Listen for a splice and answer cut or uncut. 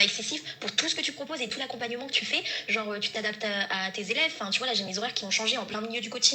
uncut